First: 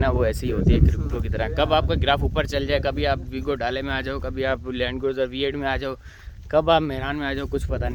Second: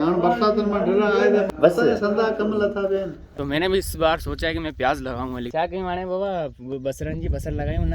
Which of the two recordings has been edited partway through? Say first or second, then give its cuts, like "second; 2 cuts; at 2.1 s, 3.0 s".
second; 3 cuts; at 1.5 s, 3.2 s, 5.5 s